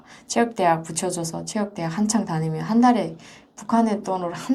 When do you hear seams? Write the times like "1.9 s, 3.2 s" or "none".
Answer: none